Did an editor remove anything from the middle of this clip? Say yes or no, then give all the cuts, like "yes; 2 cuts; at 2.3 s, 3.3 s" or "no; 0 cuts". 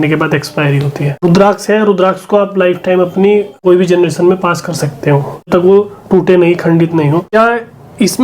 yes; 4 cuts; at 1.2 s, 3.5 s, 5.5 s, 7.4 s